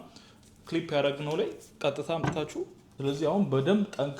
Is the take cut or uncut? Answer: cut